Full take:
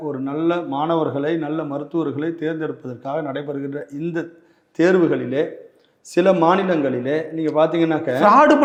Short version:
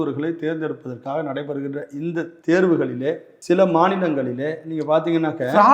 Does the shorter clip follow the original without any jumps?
no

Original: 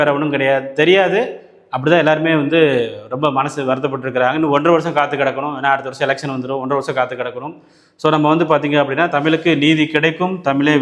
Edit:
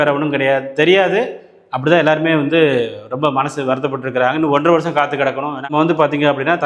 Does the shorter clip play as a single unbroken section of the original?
no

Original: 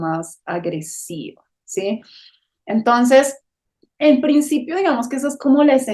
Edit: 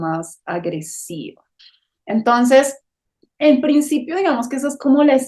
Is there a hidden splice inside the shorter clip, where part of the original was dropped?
yes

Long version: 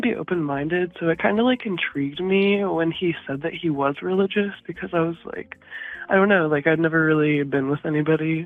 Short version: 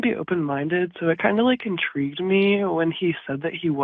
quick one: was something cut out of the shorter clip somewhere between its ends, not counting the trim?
no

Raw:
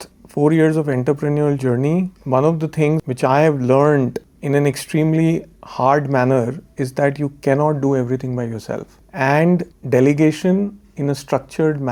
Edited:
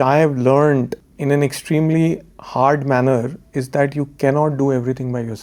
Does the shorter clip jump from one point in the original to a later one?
no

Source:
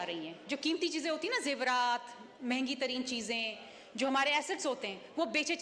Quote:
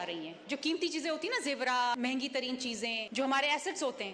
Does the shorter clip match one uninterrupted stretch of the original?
no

